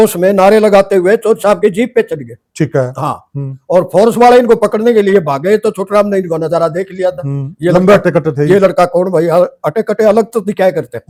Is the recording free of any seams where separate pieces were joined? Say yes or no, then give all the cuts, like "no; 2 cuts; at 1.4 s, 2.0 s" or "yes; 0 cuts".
yes; 0 cuts